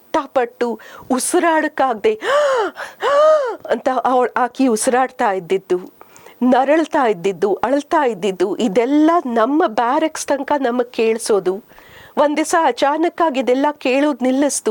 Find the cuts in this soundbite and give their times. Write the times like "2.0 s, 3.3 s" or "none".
none